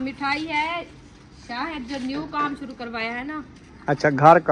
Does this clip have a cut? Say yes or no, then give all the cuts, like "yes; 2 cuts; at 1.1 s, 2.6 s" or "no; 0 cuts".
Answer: no; 0 cuts